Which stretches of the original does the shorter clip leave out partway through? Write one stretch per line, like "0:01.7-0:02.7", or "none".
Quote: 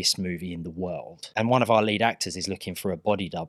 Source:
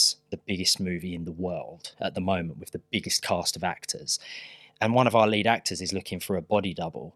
0:01.8-0:04.6